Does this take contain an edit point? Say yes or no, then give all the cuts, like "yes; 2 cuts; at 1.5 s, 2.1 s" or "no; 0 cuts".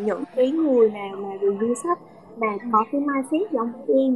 no; 0 cuts